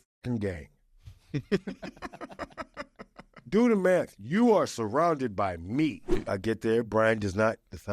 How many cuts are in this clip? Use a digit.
1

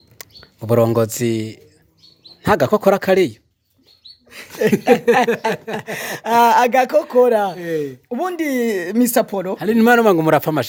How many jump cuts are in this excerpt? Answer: 0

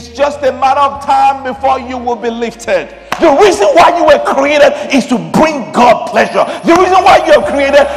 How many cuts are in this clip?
1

